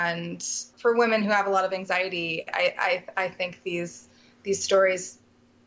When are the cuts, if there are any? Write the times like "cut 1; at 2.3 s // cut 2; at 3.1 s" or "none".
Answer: none